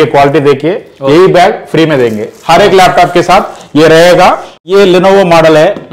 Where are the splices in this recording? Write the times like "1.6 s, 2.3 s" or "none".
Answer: 4.5 s